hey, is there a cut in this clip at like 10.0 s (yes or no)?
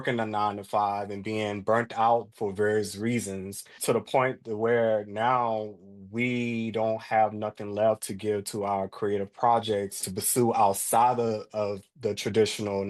yes